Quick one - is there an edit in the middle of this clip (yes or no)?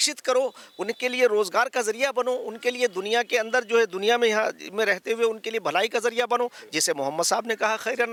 no